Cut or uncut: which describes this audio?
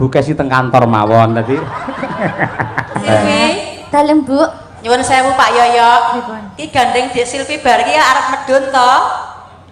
cut